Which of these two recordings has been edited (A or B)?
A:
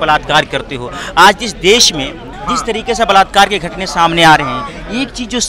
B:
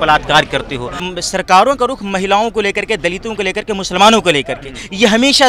B